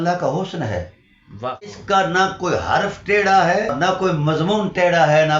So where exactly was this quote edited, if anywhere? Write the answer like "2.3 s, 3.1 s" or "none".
1.8 s, 3.7 s